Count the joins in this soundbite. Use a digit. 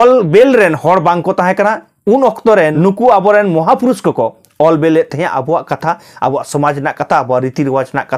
1